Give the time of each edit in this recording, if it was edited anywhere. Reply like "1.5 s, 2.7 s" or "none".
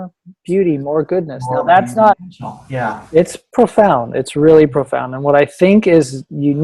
2.2 s